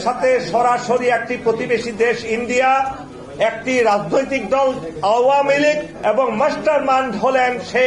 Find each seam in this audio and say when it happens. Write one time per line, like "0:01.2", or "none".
0:05.9